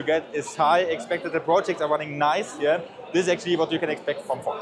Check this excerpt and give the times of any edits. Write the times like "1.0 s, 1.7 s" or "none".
none